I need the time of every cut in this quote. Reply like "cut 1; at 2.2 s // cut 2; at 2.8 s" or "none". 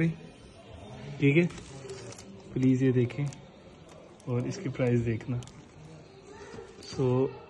none